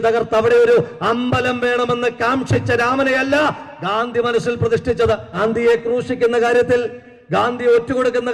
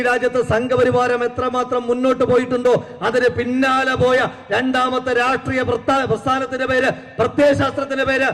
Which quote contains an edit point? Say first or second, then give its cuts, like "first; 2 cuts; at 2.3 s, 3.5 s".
first; 1 cut; at 5.4 s